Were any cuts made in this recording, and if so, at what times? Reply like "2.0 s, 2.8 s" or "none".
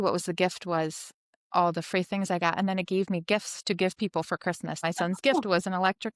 4.8 s